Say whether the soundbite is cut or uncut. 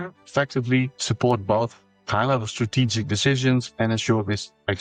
uncut